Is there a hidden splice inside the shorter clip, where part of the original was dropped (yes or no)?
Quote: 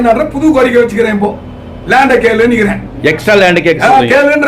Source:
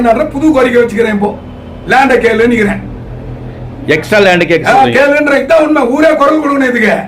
yes